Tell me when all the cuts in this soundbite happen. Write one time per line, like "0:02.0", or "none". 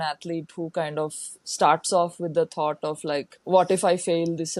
0:03.4

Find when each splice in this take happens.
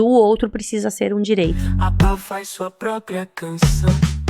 0:01.6

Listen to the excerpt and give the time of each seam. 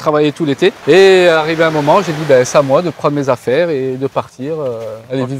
none

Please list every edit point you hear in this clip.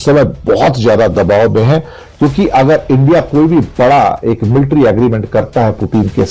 none

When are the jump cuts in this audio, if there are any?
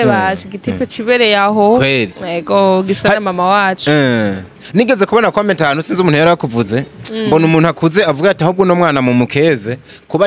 none

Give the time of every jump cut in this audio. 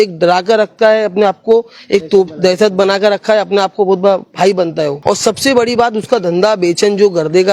0:05.0

